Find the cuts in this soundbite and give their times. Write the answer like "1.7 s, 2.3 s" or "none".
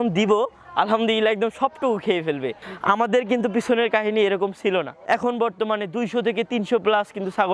2.6 s, 4.9 s